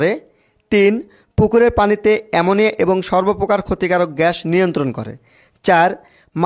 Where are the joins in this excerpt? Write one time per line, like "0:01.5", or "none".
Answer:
none